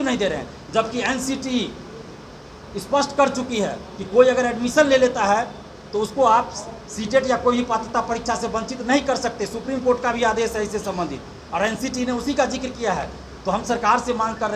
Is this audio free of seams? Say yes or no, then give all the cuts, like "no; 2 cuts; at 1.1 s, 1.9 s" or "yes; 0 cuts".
yes; 0 cuts